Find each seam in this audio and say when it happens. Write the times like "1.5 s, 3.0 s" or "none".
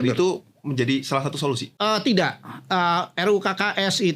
1.7 s